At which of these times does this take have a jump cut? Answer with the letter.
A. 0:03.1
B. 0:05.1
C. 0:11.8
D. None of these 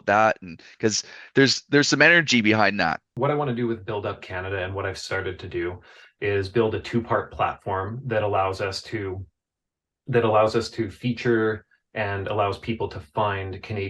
A